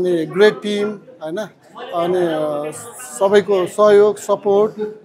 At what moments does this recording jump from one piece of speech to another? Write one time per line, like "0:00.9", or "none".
none